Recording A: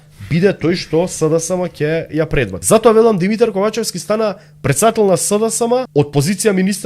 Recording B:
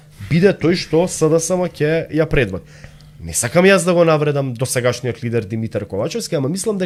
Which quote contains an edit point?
A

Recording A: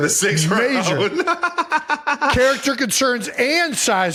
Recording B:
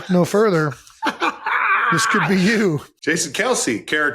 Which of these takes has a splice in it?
B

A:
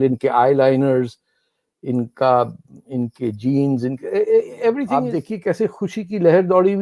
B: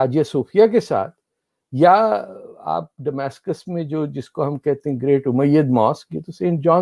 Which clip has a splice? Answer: A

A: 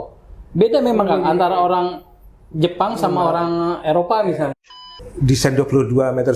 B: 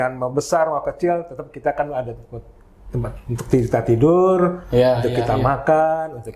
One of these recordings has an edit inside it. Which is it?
A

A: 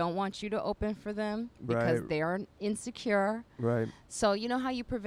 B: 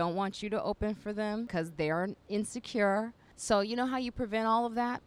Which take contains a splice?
B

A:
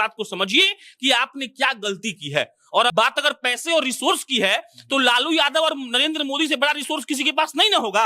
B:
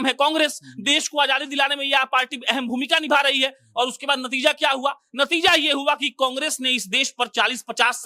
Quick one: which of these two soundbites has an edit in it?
A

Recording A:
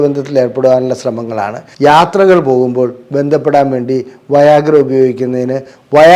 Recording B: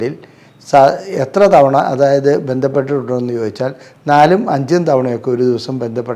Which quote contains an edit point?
A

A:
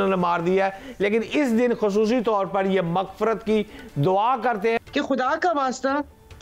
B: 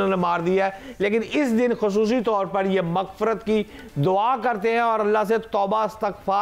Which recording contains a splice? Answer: A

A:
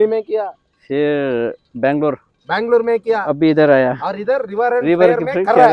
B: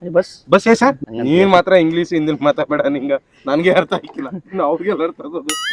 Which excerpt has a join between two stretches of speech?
B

